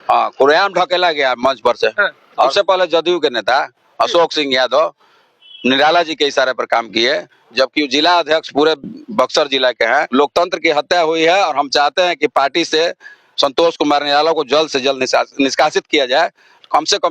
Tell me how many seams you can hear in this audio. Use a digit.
2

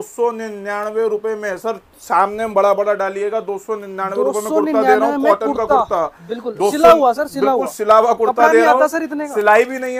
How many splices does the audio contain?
0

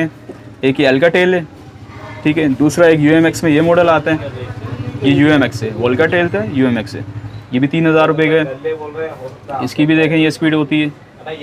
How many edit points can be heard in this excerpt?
0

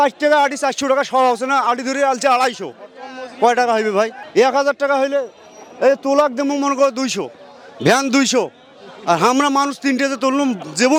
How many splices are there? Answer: 0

